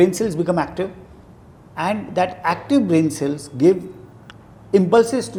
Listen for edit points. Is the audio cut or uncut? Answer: uncut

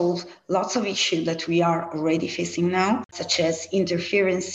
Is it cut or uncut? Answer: cut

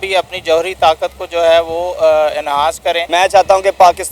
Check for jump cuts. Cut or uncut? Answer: cut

